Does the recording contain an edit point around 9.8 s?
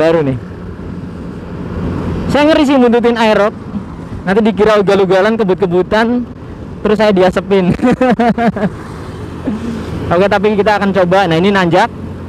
no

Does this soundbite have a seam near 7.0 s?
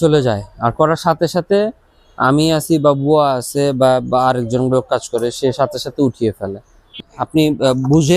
yes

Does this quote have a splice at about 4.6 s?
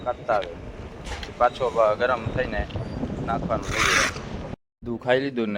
yes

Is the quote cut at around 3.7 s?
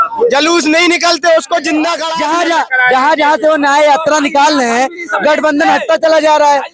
no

